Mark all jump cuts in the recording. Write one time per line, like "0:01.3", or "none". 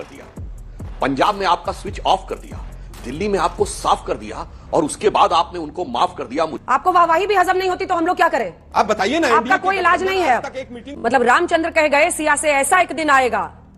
0:06.6
0:10.9